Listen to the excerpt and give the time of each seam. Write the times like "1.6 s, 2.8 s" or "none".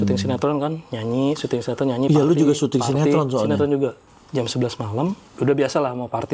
4.1 s, 5.3 s